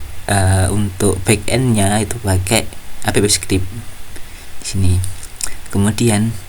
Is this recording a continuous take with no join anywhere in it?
yes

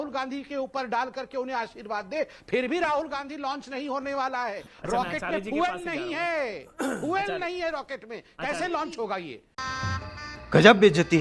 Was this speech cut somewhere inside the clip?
no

